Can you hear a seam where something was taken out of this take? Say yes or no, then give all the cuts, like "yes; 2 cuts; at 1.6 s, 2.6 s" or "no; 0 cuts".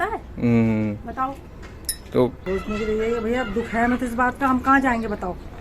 yes; 1 cut; at 2.4 s